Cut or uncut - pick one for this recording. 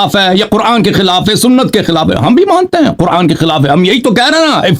uncut